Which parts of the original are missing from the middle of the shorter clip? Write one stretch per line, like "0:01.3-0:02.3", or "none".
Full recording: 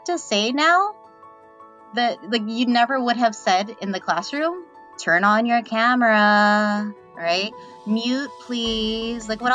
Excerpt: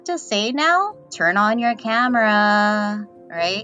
0:01.0-0:04.9